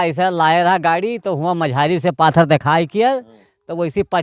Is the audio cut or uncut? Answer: uncut